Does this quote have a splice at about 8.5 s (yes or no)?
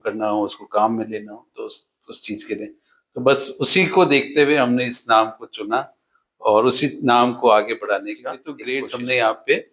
yes